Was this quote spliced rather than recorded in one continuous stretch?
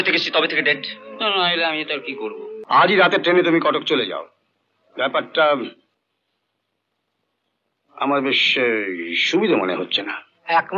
yes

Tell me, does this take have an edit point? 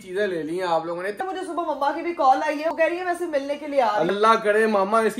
yes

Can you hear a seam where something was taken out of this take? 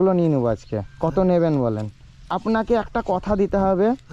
yes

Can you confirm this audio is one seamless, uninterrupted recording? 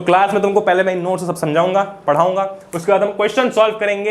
yes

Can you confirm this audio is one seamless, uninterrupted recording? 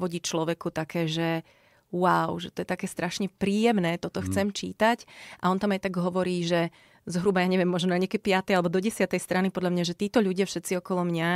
yes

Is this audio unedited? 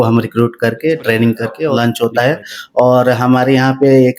no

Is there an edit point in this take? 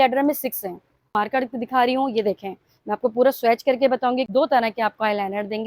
yes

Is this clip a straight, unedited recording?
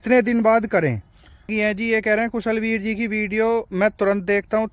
no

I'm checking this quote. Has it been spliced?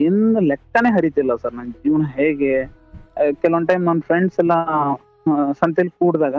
no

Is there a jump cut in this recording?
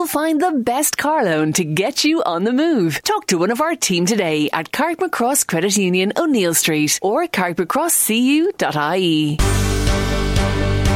yes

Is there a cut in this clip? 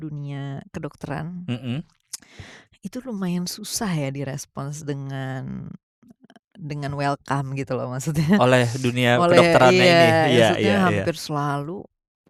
no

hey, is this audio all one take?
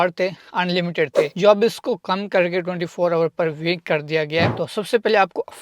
no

